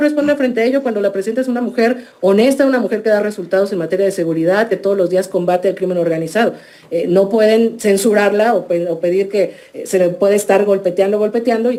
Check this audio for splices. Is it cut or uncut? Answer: uncut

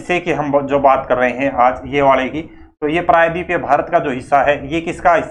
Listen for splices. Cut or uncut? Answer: uncut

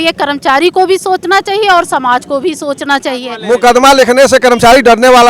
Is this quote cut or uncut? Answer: cut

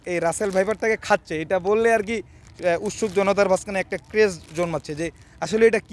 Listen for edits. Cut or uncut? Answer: uncut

